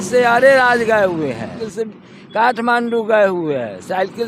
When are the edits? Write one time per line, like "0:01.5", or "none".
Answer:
0:01.6